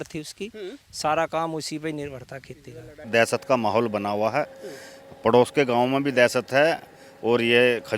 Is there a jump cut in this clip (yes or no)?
yes